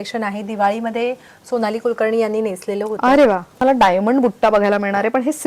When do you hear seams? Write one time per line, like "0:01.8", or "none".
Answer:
0:03.6